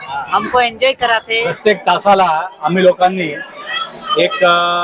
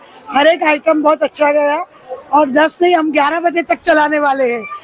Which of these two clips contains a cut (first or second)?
first